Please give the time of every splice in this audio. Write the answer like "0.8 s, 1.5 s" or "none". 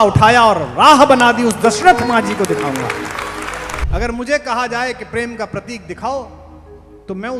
3.8 s